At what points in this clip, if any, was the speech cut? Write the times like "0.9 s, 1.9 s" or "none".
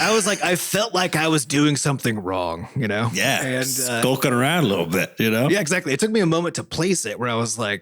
5.5 s